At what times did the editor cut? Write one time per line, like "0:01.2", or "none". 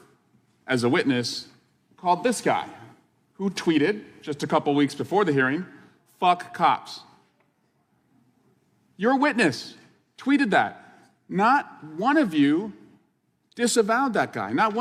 none